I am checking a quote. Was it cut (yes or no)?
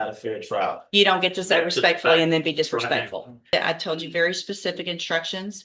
yes